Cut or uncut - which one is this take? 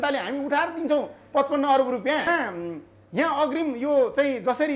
cut